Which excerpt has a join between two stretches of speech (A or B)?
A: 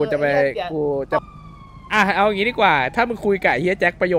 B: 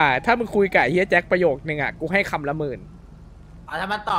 A